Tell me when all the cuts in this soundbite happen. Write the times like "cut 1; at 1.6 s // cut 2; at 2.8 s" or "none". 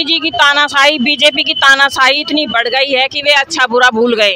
none